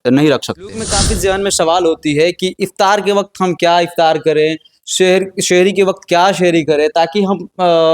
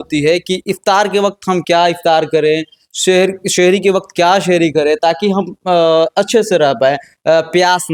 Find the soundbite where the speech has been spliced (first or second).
first